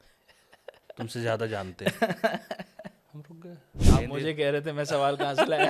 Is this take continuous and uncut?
no; 1 cut; at 3.7 s

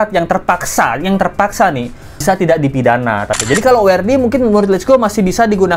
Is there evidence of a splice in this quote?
yes; 2 cuts; at 2.2 s, 3.3 s

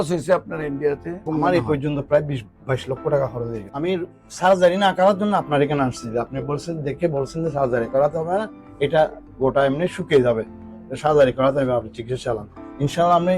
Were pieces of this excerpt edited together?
yes; 2 cuts; at 1.2 s, 3.6 s

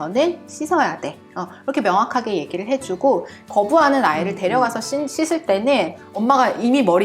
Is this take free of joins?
no; 1 cut; at 6.0 s

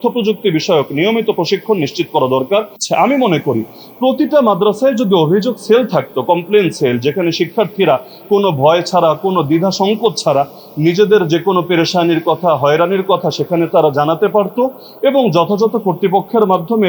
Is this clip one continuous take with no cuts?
no; 1 cut; at 2.8 s

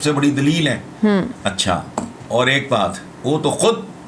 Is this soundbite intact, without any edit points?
no; 2 cuts; at 2.2 s, 3.1 s

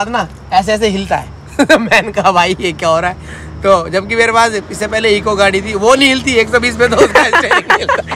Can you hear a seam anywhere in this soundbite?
no; 0 cuts

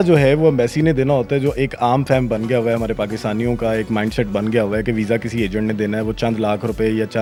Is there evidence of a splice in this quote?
no; 0 cuts

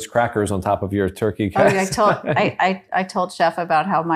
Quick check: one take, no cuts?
yes; 0 cuts

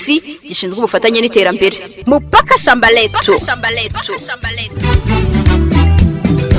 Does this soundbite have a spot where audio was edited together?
yes; 1 cut; at 1.9 s

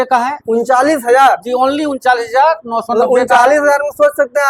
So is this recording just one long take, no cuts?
yes; 0 cuts

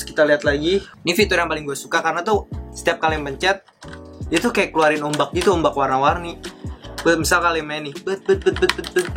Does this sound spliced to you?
yes; 1 cut; at 0.9 s

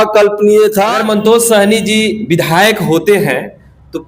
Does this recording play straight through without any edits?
no; 1 cut; at 1.0 s

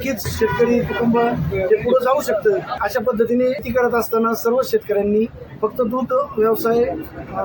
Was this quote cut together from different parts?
yes; 1 cut; at 2.8 s

